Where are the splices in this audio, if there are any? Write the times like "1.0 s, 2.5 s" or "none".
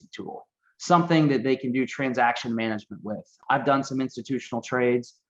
3.3 s